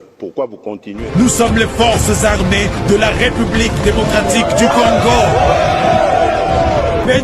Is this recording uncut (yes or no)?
no